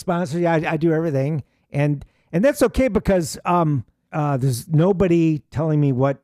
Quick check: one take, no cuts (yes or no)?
no